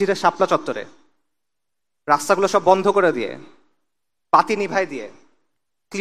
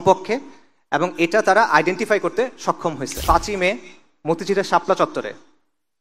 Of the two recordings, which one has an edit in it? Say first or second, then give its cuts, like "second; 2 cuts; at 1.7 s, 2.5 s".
second; 1 cut; at 3.1 s